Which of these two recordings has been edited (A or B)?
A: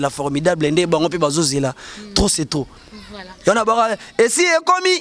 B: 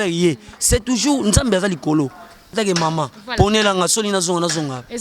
B